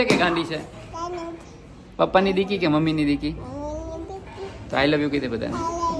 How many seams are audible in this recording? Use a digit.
0